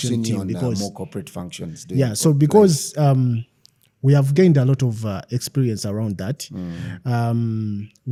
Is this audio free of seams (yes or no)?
yes